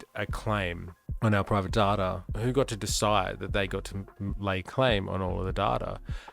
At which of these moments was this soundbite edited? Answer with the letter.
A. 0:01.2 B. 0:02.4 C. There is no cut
B